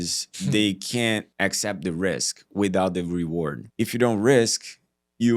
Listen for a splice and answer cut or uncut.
cut